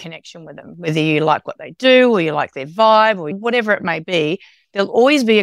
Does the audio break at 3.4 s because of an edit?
yes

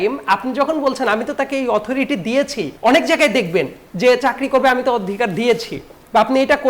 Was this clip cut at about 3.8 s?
yes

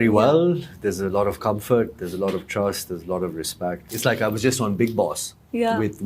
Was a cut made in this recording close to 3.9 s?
yes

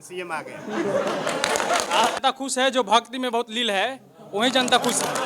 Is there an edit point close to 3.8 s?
no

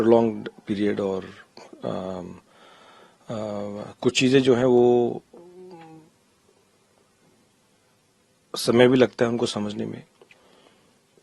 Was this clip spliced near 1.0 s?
no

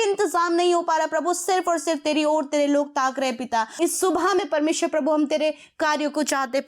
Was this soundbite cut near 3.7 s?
yes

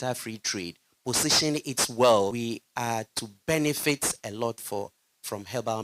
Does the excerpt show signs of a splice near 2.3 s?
yes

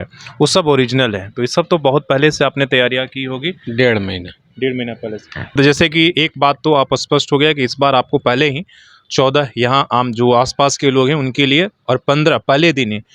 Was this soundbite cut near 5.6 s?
yes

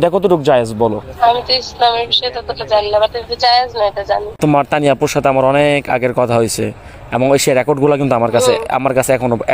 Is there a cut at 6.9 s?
no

